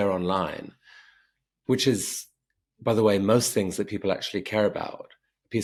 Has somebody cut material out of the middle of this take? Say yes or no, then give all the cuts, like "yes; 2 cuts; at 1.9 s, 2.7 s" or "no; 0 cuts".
no; 0 cuts